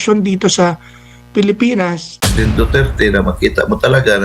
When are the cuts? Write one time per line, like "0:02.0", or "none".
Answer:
0:02.3